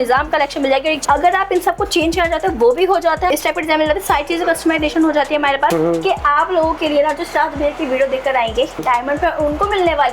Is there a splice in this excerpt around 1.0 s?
yes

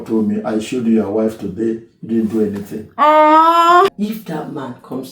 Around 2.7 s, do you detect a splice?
no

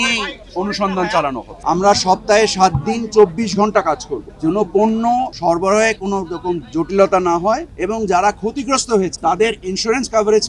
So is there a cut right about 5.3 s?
yes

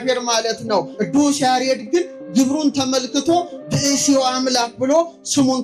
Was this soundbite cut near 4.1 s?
no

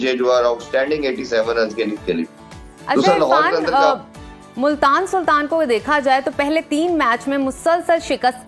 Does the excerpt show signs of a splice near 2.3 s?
no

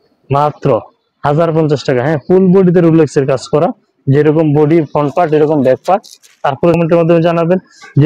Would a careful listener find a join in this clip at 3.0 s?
no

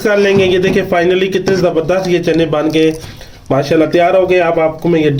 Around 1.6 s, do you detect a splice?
no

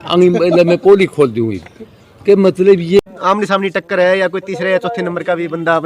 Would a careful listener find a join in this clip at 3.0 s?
yes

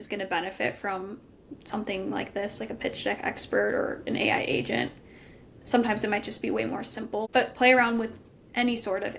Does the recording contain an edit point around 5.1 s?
no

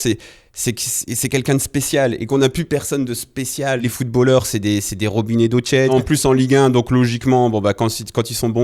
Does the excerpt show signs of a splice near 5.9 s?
yes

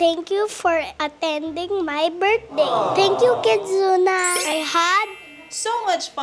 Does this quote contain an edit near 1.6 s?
no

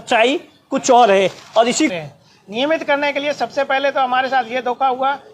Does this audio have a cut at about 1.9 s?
yes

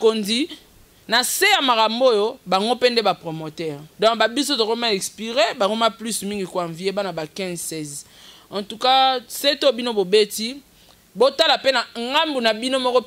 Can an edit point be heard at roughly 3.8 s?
yes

